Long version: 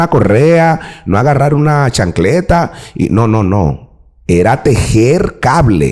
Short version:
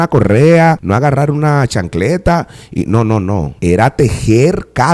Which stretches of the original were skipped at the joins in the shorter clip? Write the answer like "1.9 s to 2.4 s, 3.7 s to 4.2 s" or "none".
0.8 s to 1.0 s, 3.7 s to 4.2 s